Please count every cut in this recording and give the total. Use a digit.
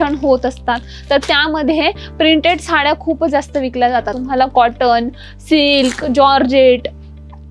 0